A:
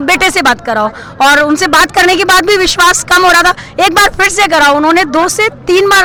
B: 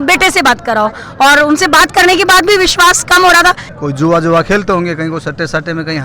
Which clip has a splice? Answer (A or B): B